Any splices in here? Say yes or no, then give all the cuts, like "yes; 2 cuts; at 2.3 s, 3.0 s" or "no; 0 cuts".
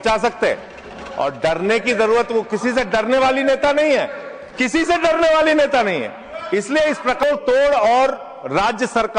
yes; 1 cut; at 7.2 s